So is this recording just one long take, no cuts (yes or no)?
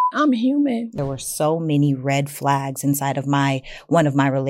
no